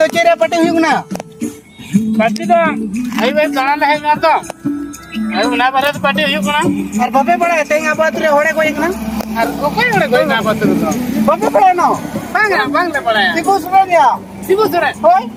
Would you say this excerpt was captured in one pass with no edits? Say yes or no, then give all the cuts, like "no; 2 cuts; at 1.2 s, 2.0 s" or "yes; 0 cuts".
yes; 0 cuts